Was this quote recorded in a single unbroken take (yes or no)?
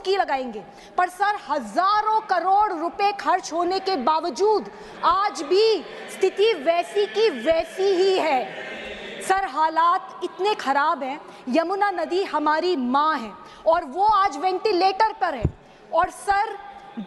yes